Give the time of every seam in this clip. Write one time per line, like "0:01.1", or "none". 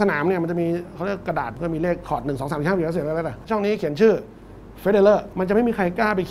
0:01.6
0:03.4
0:05.3